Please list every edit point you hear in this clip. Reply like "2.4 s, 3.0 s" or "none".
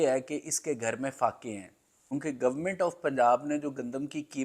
2.2 s